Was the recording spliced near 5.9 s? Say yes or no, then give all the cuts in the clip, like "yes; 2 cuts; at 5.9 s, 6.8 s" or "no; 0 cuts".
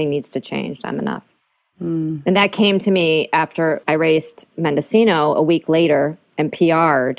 no; 1 cut; at 3.8 s